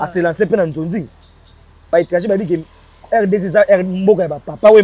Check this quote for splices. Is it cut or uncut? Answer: cut